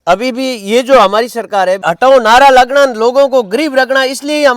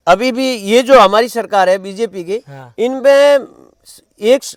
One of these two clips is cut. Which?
first; 1 cut; at 1.9 s

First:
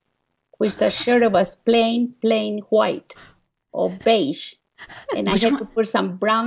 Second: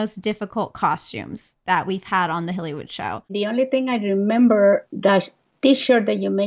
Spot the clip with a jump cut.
second; 2 cuts; at 3.3 s, 4.9 s

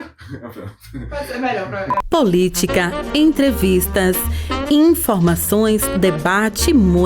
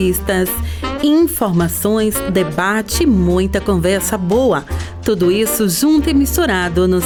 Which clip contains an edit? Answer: first; 1 cut; at 2.0 s

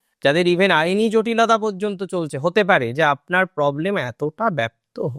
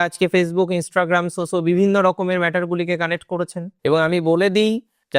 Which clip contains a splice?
second; 1 cut; at 3.6 s

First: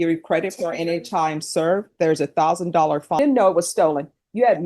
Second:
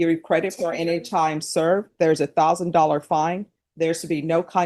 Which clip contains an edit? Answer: first; 1 cut; at 3.2 s

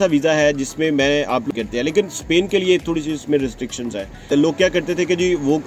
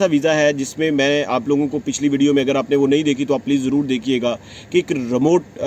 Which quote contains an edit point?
first; 2 cuts; at 1.5 s, 4.3 s

